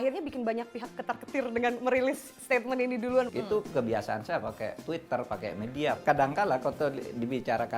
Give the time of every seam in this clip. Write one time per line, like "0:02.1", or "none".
0:03.3
0:06.0

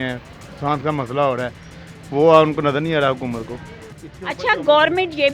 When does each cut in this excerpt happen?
none

